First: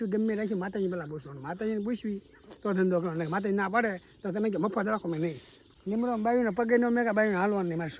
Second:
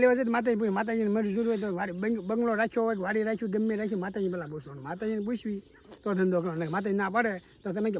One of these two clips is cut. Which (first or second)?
first